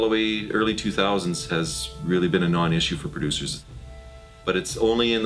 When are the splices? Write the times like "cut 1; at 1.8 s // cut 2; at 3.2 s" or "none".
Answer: cut 1; at 3.8 s